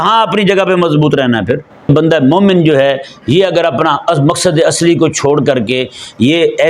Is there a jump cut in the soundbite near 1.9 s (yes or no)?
yes